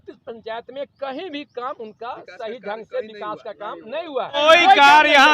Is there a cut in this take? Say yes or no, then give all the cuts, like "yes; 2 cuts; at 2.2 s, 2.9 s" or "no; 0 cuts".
yes; 1 cut; at 4.4 s